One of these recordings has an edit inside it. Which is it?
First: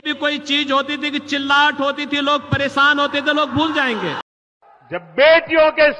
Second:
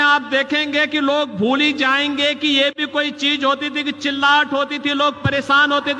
first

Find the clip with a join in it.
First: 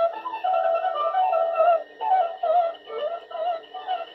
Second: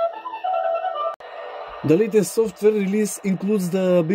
second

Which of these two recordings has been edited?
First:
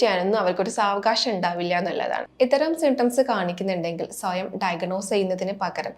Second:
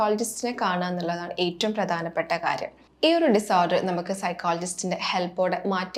first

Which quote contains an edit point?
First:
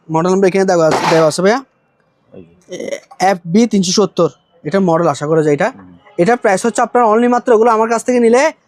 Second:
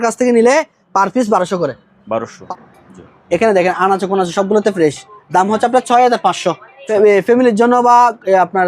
second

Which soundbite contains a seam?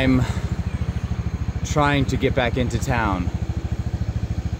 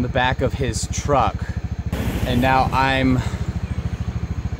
second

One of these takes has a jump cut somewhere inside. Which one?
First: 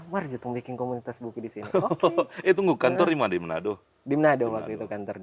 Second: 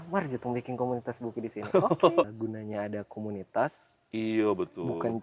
second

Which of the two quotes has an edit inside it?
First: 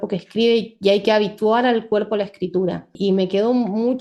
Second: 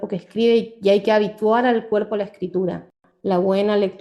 second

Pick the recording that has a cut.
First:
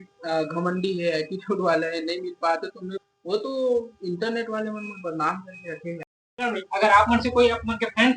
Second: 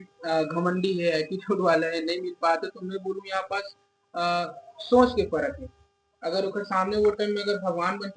first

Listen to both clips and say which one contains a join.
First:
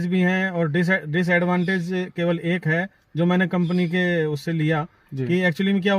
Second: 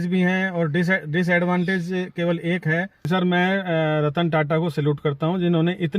second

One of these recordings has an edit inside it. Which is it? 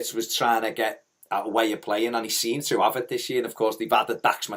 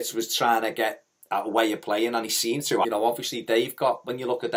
first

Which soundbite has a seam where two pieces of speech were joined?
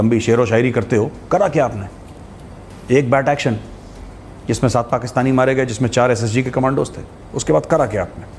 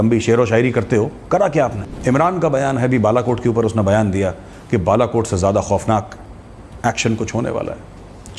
second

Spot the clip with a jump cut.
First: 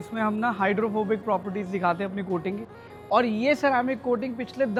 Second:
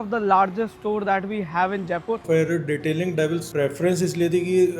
second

